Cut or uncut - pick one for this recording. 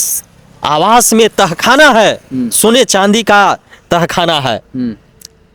uncut